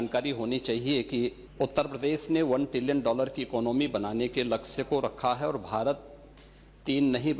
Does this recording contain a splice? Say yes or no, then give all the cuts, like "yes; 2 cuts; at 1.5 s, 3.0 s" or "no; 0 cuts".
yes; 1 cut; at 1.4 s